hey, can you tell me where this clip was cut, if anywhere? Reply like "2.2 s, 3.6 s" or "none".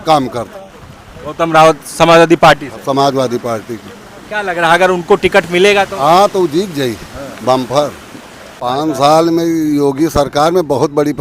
8.8 s